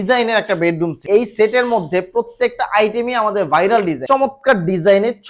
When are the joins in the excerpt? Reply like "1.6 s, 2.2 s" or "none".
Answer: 1.0 s, 4.0 s